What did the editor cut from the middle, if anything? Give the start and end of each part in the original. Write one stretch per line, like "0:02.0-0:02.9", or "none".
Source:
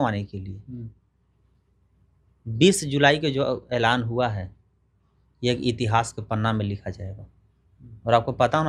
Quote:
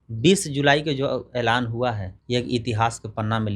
0:04.5-0:05.2